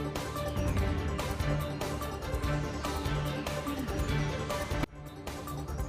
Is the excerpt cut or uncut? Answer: cut